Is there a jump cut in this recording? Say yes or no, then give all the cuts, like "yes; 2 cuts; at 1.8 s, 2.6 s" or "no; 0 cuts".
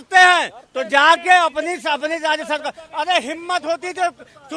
no; 0 cuts